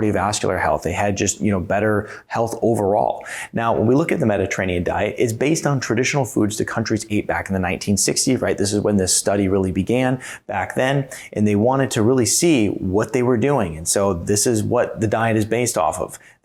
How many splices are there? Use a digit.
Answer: 0